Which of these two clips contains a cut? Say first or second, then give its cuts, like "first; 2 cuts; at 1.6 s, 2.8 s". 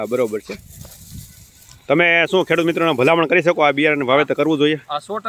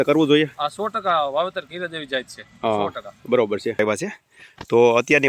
second; 1 cut; at 3.8 s